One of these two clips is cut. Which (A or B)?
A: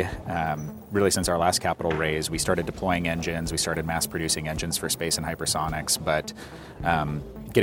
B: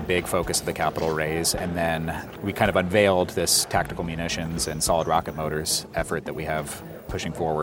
B